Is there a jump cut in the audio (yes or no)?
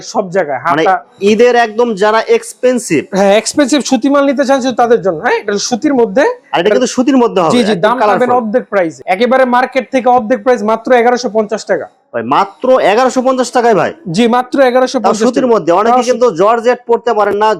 no